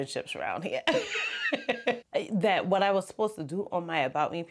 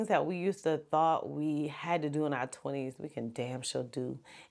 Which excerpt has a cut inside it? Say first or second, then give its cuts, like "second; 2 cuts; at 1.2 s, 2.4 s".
first; 1 cut; at 2.0 s